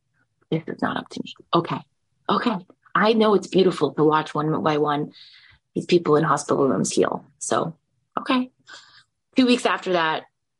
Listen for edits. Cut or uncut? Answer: cut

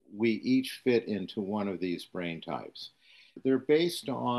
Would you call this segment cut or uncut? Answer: cut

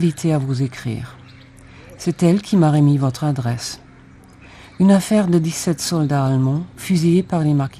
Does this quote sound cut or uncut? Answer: uncut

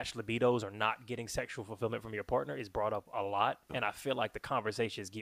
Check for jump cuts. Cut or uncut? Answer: cut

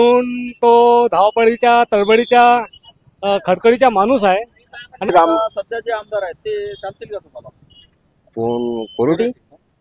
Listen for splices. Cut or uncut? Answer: cut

